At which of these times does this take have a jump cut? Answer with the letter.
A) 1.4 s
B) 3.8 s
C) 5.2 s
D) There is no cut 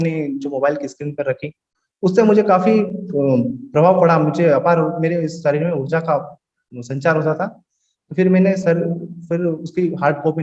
D